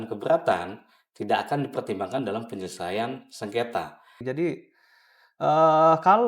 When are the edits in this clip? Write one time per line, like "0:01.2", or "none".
0:04.2